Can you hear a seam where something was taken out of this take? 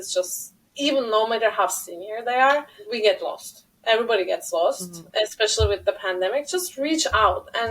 yes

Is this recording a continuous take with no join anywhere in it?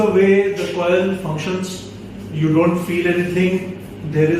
yes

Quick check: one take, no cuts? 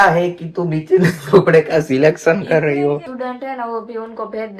no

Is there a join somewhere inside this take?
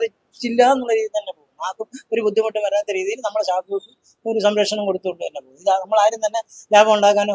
no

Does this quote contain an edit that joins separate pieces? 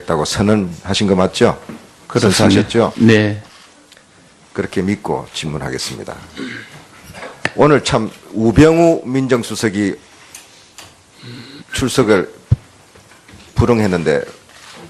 yes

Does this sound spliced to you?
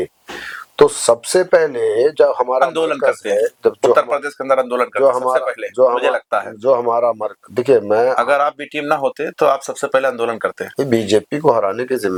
no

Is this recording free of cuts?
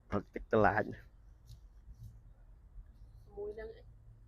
yes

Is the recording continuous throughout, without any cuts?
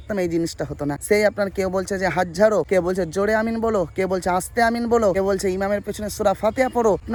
yes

